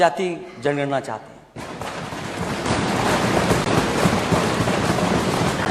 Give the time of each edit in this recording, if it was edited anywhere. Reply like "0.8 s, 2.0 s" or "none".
none